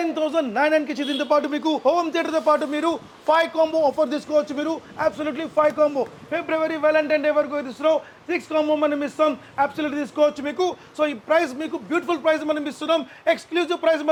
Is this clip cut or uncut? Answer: uncut